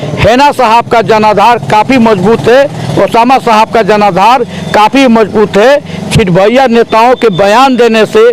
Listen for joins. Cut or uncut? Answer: uncut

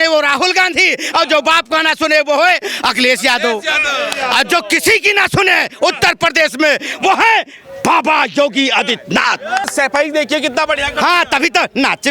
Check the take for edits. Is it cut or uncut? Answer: cut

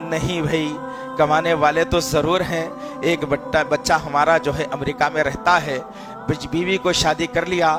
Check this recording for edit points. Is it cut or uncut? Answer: uncut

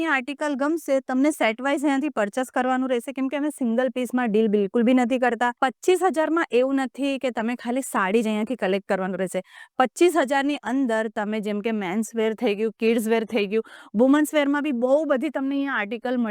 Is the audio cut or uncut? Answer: cut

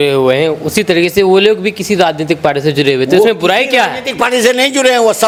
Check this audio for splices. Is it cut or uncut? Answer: uncut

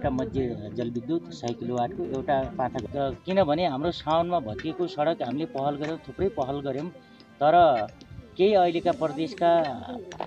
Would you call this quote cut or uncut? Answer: cut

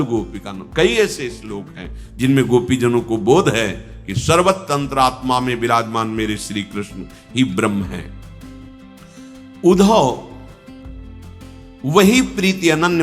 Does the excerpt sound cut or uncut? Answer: cut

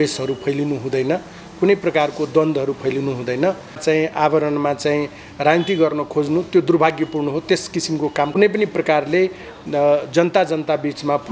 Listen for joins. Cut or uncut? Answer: cut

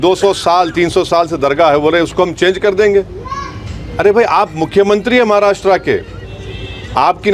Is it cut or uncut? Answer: uncut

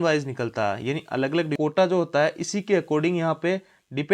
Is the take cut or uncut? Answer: cut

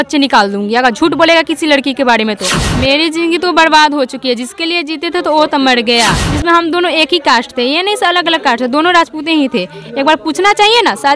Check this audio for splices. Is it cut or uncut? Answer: cut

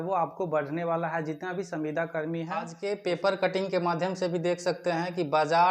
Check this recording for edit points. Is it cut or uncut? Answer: cut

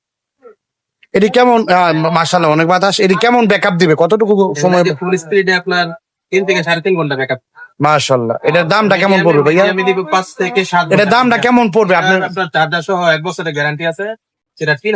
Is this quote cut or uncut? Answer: uncut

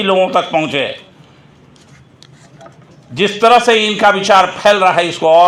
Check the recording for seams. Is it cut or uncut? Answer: uncut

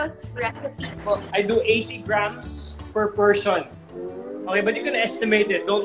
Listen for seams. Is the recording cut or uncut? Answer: cut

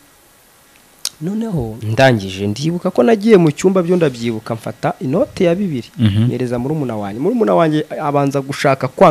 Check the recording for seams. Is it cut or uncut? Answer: cut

